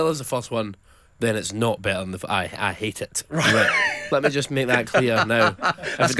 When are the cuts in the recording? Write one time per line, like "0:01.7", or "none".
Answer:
0:04.0